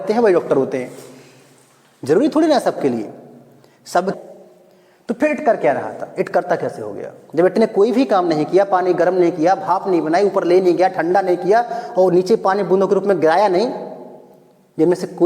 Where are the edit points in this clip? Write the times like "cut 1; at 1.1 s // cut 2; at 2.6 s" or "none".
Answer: cut 1; at 4.2 s